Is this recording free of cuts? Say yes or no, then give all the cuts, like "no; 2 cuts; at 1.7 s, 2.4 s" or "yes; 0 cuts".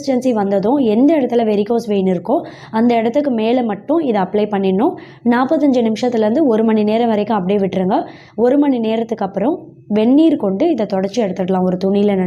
yes; 0 cuts